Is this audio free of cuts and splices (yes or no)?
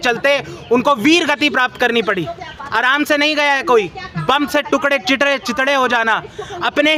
yes